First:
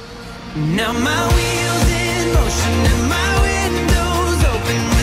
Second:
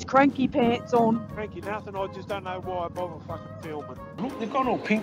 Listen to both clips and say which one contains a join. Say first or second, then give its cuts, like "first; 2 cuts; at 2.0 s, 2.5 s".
second; 2 cuts; at 1.3 s, 4.2 s